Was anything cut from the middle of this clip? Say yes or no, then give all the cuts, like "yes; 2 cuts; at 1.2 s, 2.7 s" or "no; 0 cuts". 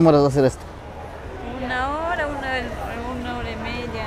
no; 0 cuts